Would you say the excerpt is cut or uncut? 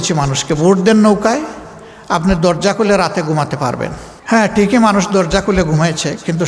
cut